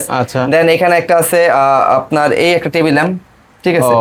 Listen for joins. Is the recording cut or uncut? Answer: uncut